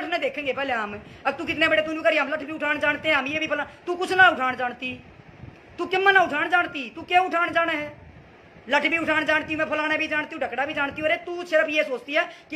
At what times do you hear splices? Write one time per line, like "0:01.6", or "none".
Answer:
none